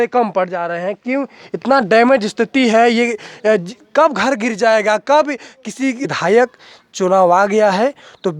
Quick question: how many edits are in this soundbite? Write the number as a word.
one